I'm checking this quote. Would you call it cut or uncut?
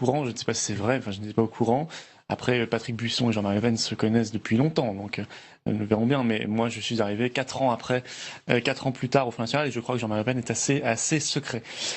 cut